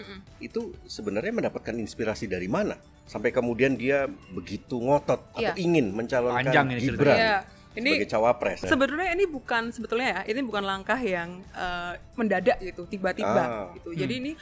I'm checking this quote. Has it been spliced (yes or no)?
yes